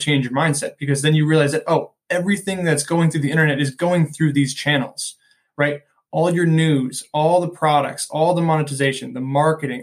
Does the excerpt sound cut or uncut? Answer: uncut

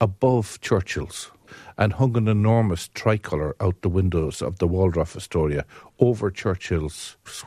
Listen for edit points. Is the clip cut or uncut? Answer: uncut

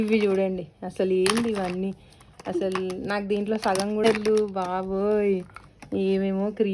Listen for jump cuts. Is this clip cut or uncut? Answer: cut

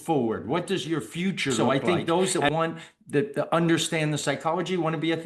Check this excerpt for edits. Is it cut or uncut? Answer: cut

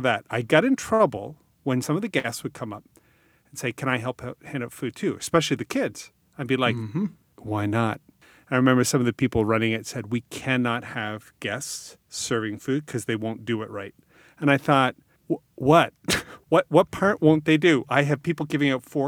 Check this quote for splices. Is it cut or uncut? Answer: cut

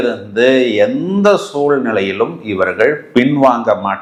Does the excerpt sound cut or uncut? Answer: uncut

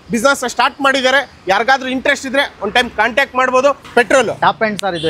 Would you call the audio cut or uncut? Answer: cut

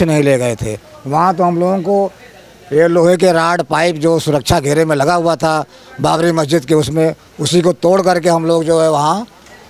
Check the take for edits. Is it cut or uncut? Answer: uncut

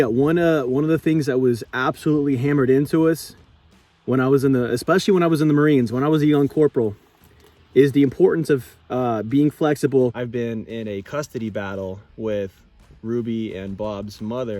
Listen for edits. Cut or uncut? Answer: cut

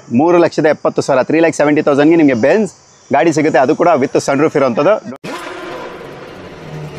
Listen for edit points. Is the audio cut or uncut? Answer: cut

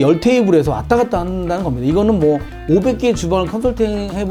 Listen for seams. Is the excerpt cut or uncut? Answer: uncut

